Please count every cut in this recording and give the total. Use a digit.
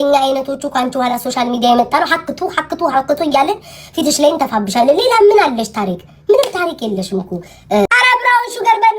1